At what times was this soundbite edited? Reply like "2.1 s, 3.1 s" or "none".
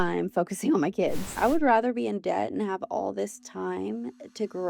1.3 s

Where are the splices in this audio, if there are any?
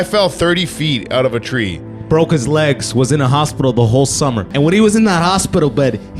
4.5 s

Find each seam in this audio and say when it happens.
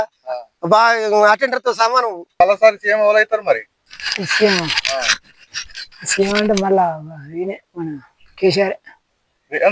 2.3 s

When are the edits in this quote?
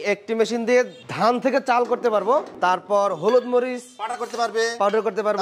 1.0 s, 2.5 s

